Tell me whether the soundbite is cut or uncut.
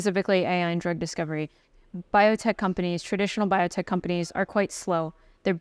cut